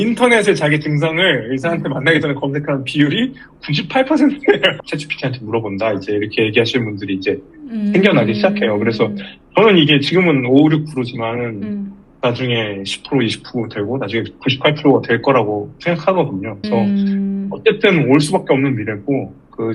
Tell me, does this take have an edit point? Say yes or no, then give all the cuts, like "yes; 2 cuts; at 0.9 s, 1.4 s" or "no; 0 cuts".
yes; 2 cuts; at 4.8 s, 16.6 s